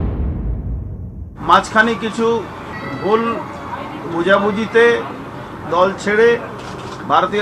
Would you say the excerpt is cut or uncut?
cut